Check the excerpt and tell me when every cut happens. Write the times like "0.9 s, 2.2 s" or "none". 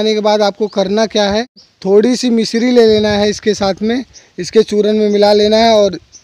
1.7 s